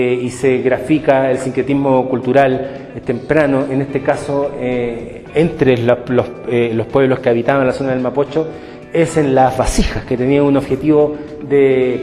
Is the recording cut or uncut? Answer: uncut